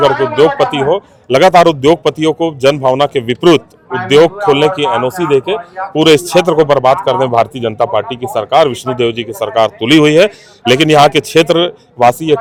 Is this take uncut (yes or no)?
yes